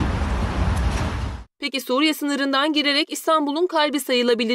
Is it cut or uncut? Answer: uncut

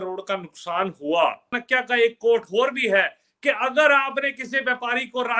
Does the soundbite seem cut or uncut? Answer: cut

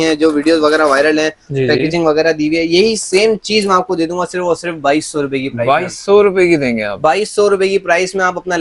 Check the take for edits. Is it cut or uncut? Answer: uncut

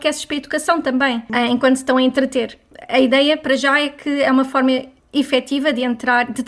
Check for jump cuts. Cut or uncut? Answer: cut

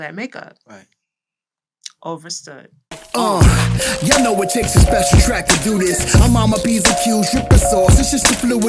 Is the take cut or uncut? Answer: cut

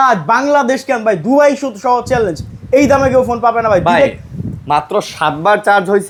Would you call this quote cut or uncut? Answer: uncut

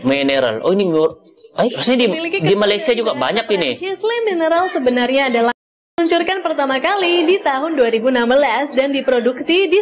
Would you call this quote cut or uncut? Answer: cut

